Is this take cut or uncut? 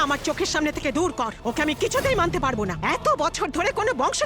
cut